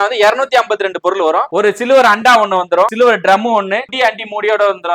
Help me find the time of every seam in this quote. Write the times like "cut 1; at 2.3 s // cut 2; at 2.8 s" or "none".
cut 1; at 1.5 s // cut 2; at 2.9 s // cut 3; at 3.9 s